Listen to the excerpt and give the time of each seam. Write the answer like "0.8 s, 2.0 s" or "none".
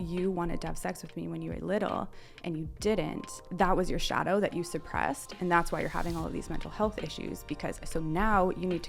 3.4 s